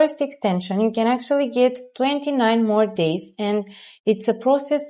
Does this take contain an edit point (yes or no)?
no